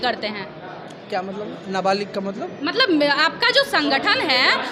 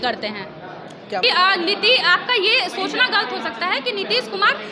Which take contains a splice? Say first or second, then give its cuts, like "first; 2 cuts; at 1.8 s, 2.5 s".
second; 1 cut; at 1.2 s